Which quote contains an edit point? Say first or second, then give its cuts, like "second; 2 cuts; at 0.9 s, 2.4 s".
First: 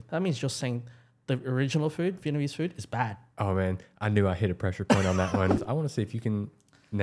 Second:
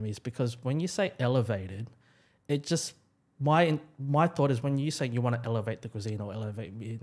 first; 1 cut; at 5.6 s